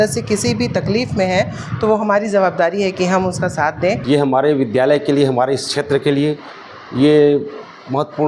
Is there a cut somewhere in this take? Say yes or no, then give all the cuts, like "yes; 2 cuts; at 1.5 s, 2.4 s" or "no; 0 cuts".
yes; 1 cut; at 4.0 s